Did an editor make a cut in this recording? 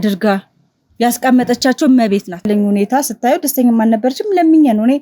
yes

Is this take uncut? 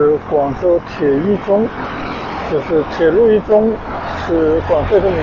yes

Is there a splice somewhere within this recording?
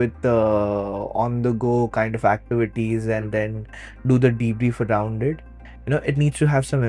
no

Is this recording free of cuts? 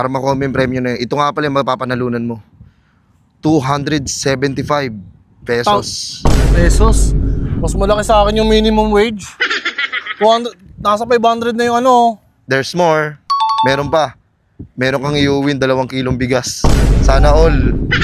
yes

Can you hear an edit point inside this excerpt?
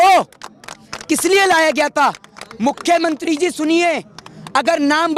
no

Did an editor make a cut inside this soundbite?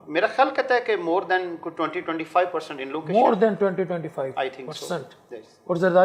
no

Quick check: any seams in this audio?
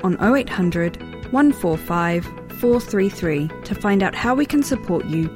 no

